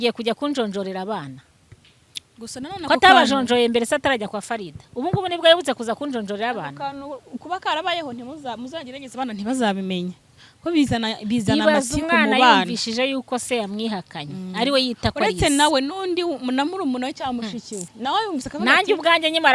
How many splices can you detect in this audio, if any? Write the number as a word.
zero